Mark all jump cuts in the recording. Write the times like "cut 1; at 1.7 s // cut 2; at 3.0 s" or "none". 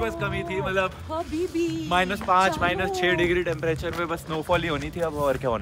none